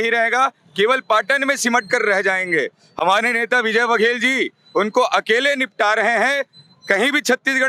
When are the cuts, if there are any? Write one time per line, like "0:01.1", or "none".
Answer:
none